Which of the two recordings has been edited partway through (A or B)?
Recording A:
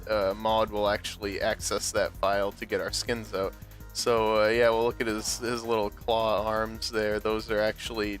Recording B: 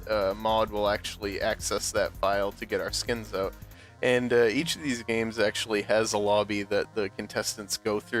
A